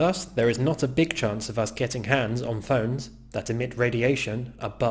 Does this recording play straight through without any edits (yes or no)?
yes